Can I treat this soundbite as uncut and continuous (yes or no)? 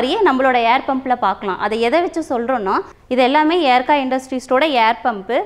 no